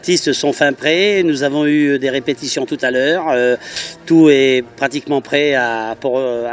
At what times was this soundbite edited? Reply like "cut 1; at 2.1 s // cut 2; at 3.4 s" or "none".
cut 1; at 2.3 s